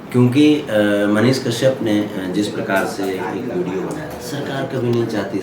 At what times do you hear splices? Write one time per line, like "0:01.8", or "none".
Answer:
0:04.1